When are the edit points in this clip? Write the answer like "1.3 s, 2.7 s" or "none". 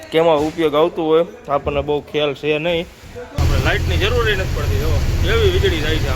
3.3 s